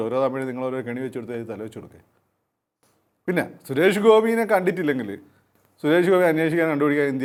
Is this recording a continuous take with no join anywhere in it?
yes; 0 cuts

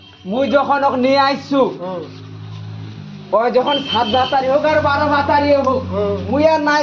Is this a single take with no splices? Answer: yes; 0 cuts

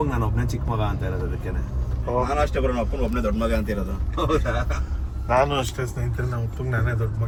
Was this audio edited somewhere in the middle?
no; 0 cuts

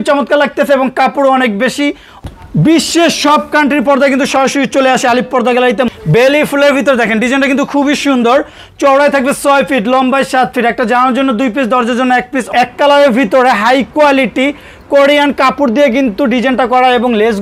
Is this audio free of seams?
no; 3 cuts; at 2.1 s, 5.9 s, 12.5 s

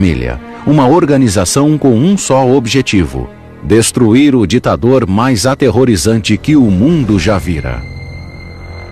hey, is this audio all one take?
yes; 0 cuts

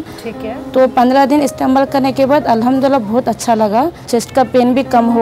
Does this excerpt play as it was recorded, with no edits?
no; 1 cut; at 4.1 s

